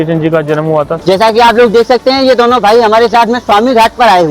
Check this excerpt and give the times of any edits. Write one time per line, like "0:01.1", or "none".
0:00.9

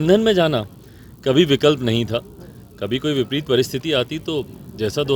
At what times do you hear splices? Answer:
none

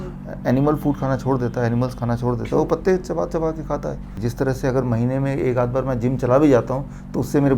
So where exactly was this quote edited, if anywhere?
0:04.2

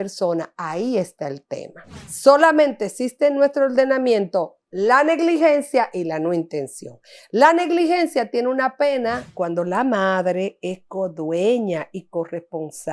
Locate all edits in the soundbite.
0:02.1
0:09.3

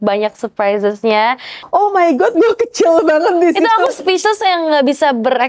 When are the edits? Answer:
0:01.5

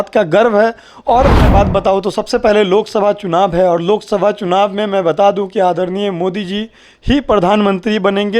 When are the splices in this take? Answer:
0:01.5

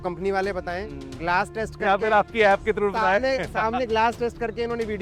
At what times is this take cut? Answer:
none

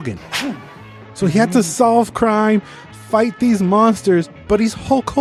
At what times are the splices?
none

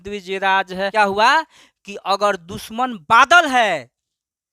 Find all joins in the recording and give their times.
0:00.9

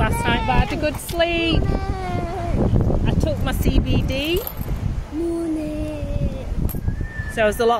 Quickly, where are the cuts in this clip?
none

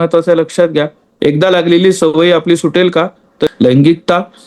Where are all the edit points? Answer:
0:01.1
0:03.5

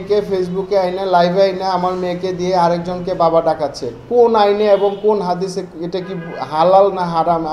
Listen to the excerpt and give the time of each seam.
none

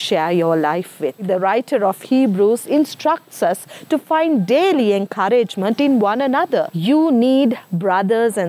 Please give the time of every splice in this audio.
0:01.2
0:06.7

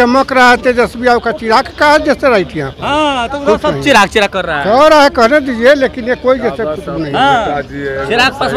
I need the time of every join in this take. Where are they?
none

